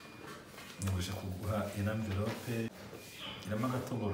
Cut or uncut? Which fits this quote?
cut